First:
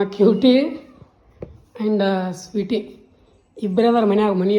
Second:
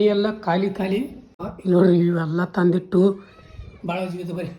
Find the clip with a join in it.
second; 1 cut; at 1.5 s

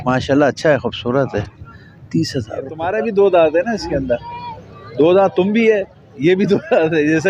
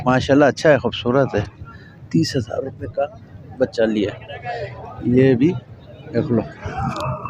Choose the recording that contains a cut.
first; 1 cut; at 3.0 s

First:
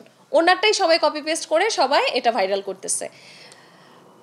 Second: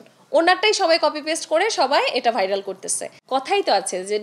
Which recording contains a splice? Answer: second; 1 cut; at 3.1 s

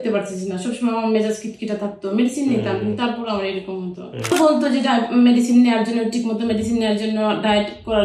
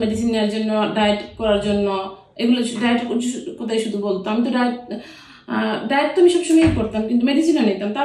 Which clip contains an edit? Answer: first; 1 cut; at 4.3 s

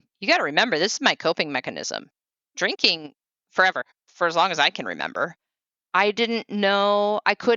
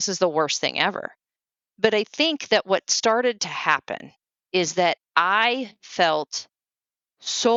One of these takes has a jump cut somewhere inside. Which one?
first; 1 cut; at 3.9 s

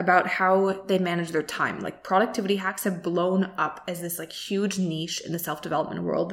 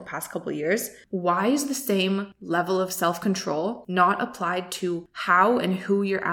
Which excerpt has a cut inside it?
second; 4 cuts; at 1.0 s, 2.3 s, 3.8 s, 5.1 s

